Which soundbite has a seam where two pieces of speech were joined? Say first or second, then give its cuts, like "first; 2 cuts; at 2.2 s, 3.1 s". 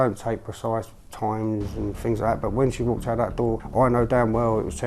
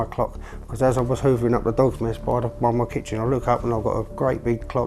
first; 1 cut; at 3.6 s